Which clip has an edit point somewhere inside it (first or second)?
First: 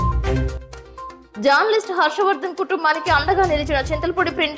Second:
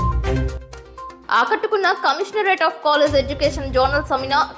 first